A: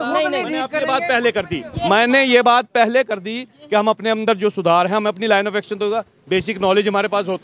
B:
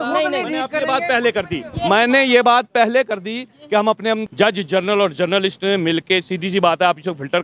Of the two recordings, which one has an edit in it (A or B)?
B